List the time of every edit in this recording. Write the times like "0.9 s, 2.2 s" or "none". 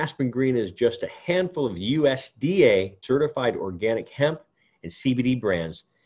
3.0 s